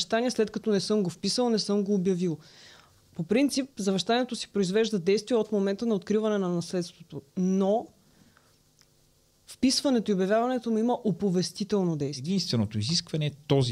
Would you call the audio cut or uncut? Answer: cut